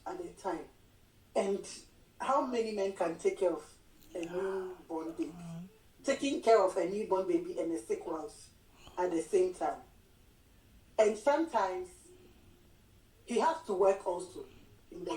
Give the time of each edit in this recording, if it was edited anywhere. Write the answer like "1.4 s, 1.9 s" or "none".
5.9 s